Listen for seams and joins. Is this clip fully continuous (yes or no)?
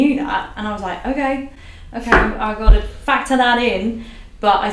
yes